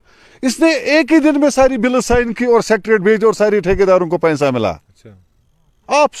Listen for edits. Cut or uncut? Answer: uncut